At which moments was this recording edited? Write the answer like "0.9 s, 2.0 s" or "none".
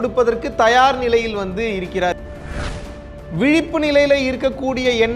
2.8 s